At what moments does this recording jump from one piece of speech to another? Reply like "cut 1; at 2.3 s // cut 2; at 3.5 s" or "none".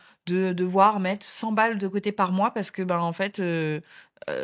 none

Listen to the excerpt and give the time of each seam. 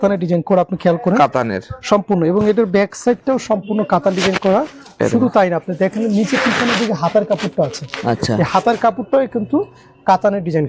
none

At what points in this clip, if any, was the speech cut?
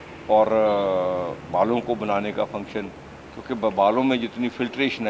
none

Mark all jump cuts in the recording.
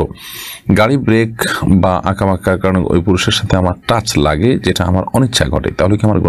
none

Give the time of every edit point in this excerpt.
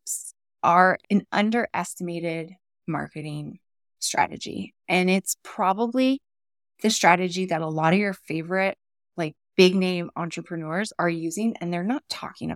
cut 1; at 1.1 s

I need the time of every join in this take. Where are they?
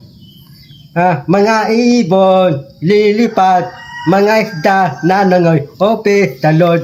none

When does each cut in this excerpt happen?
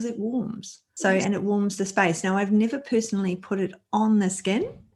none

